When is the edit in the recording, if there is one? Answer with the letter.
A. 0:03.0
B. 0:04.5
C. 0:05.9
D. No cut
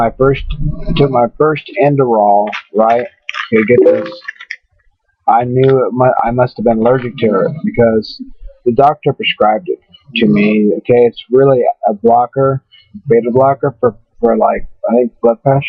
C